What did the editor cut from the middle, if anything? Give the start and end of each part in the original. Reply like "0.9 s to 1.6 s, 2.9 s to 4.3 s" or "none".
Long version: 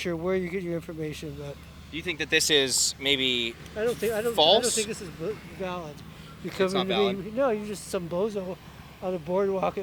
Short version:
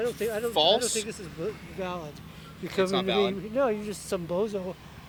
none